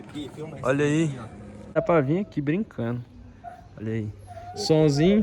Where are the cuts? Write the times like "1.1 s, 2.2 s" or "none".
1.8 s